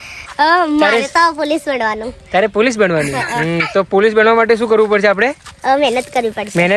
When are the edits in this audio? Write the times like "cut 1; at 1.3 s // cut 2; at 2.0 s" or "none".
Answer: none